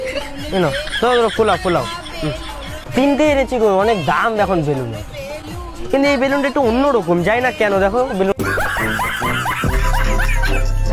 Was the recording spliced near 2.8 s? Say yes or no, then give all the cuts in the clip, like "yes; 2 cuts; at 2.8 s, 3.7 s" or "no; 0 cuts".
no; 0 cuts